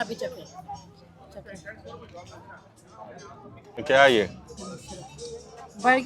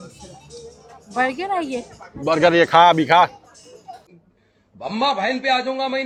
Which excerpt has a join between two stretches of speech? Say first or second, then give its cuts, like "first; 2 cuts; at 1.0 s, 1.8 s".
first; 1 cut; at 3.8 s